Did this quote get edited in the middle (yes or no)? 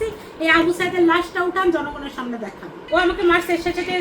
yes